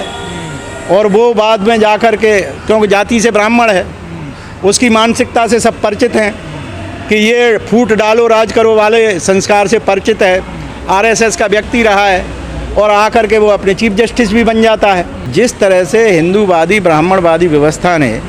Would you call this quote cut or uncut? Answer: cut